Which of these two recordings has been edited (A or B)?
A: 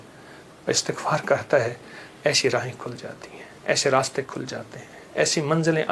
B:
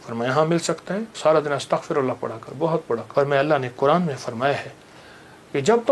B